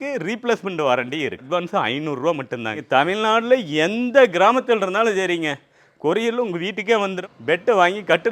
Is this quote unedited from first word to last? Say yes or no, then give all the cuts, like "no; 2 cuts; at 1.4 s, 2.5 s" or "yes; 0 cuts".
no; 3 cuts; at 1.4 s, 2.8 s, 7.2 s